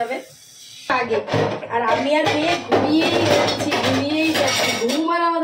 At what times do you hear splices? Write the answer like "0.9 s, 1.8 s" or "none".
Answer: 0.9 s